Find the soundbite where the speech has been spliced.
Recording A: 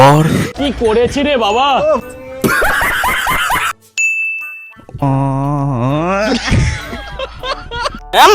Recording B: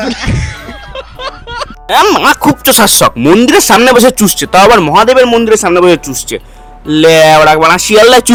A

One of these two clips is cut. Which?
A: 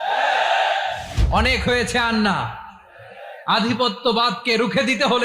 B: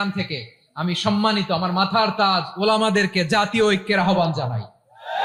A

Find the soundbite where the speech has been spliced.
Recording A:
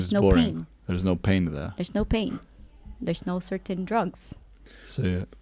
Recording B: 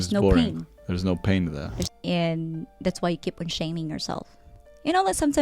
B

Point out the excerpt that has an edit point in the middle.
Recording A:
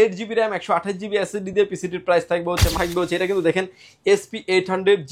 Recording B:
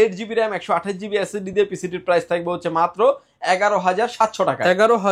A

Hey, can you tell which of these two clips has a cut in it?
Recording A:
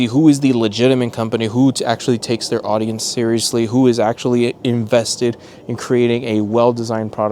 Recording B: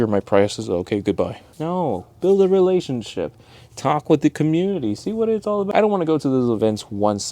B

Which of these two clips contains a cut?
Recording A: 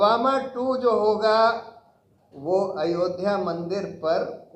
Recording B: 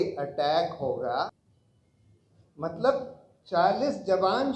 B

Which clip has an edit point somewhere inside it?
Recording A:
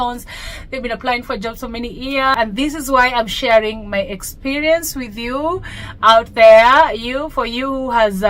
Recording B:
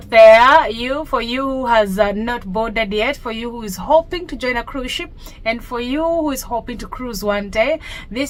A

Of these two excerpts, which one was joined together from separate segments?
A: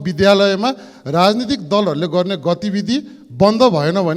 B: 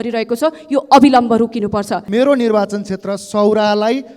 B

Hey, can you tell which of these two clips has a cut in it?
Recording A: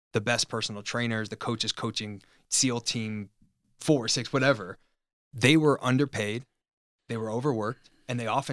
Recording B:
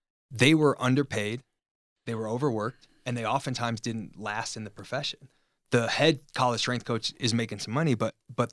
A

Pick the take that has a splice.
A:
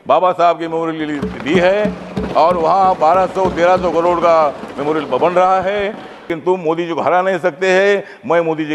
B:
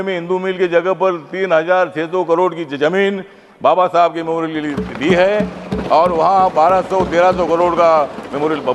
A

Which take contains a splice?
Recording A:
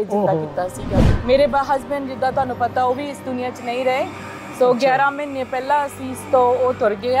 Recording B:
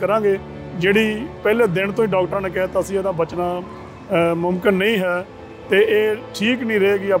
A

